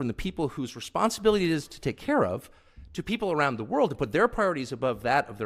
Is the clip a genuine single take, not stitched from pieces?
yes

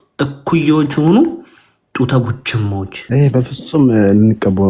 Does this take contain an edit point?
yes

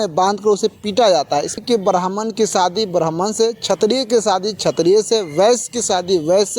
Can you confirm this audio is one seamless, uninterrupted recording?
no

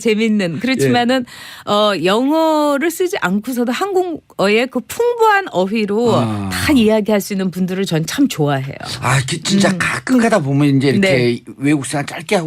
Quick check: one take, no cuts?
no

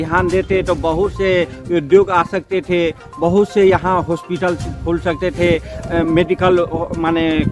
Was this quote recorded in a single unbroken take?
yes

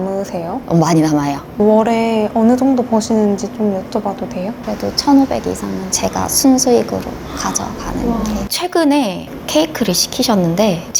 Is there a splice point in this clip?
yes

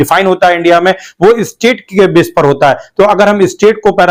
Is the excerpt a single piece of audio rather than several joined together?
yes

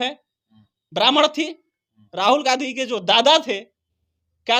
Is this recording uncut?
yes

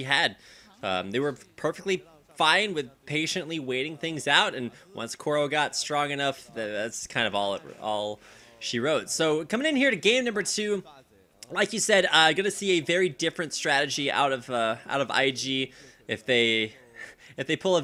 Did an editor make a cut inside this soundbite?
no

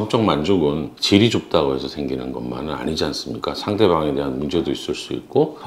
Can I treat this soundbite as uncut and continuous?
no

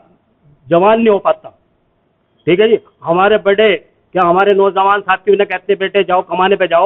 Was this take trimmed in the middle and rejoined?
no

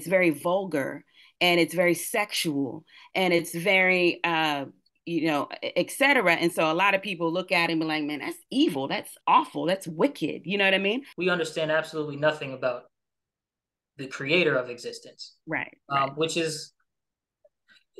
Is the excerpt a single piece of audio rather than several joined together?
no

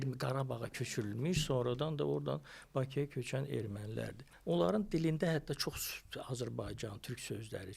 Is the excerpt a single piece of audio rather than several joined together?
no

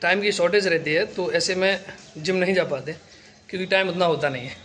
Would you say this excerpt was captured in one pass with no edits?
yes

